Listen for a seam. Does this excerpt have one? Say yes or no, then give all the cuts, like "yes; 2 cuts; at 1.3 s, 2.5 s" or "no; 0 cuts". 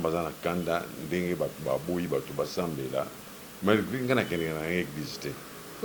no; 0 cuts